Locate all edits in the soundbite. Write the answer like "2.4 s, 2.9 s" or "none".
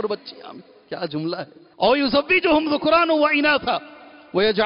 1.6 s